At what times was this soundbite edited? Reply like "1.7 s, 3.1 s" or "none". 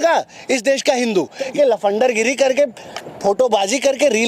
1.5 s